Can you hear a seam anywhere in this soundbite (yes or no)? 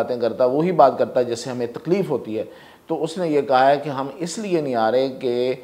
no